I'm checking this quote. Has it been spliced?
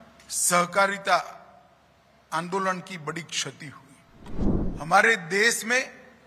yes; 1 cut; at 4.4 s

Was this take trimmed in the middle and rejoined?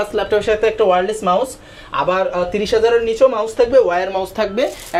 no; 0 cuts

